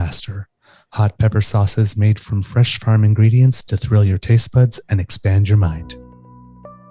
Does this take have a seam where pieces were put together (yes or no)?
yes